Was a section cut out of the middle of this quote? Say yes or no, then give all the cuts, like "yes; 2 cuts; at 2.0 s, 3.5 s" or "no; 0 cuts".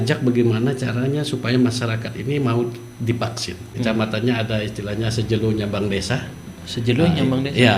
yes; 1 cut; at 3.6 s